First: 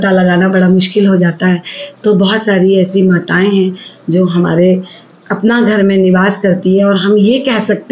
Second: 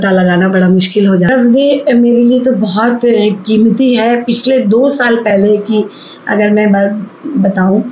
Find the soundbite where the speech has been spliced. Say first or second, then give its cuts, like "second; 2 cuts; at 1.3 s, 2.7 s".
second; 1 cut; at 1.3 s